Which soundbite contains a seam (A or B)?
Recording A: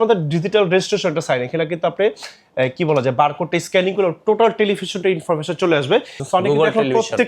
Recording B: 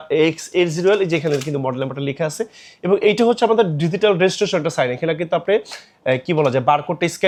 A